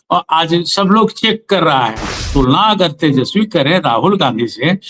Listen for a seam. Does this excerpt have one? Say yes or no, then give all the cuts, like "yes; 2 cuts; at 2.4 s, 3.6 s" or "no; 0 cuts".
yes; 1 cut; at 2.2 s